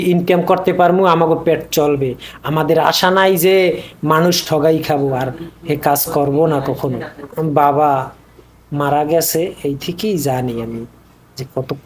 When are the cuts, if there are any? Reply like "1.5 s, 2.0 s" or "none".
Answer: 7.2 s